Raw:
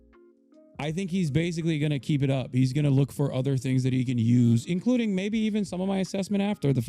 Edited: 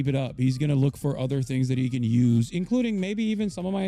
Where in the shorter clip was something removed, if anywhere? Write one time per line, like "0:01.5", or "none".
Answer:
none